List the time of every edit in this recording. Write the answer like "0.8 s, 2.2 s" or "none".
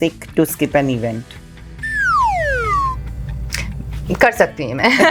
none